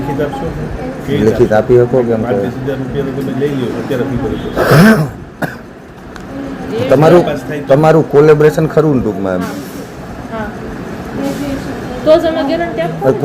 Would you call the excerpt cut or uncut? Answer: uncut